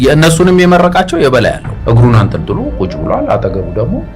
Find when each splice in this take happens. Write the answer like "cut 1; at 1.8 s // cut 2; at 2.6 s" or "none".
cut 1; at 1.7 s